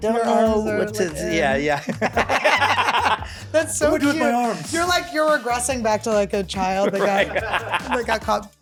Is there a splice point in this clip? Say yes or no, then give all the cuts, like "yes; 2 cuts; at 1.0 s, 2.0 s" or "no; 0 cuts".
no; 0 cuts